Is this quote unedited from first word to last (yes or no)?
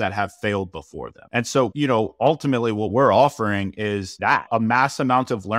no